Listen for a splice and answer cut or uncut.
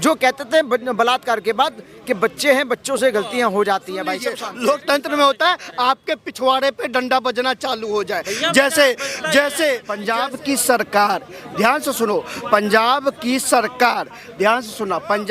cut